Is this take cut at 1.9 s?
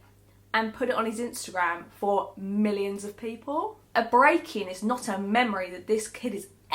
no; 1 cut; at 3.8 s

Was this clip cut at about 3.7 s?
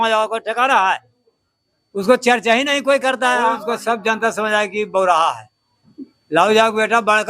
yes; 1 cut; at 3.7 s

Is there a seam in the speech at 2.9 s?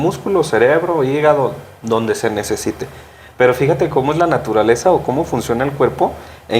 no; 0 cuts

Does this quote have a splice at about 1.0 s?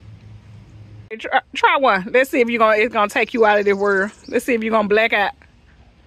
yes; 1 cut; at 1.0 s

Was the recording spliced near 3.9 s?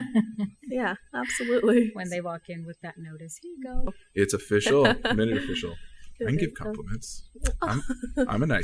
yes; 1 cut; at 3.9 s

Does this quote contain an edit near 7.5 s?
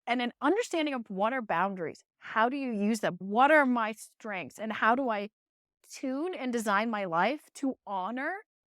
no; 2 cuts; at 3.2 s, 5.8 s

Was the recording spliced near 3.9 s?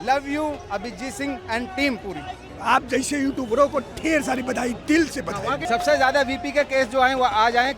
no; 2 cuts; at 2.5 s, 5.6 s

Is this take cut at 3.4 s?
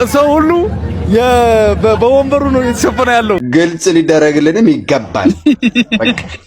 yes; 1 cut; at 3.4 s

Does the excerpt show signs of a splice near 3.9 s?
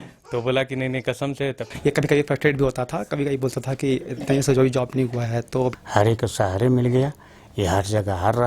no; 2 cuts; at 1.7 s, 5.7 s

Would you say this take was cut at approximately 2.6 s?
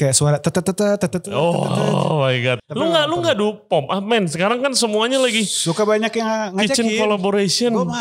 yes; 1 cut; at 2.6 s

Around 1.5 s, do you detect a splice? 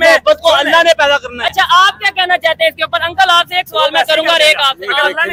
no; 0 cuts

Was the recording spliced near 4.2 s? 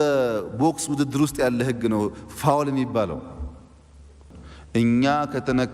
yes; 1 cut; at 4.2 s

